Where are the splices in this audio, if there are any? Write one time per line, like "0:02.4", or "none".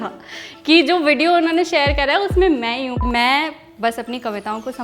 0:03.0